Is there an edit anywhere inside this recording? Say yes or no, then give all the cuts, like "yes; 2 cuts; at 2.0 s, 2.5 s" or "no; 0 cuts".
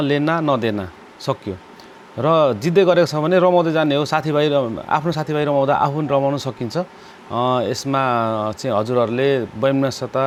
no; 0 cuts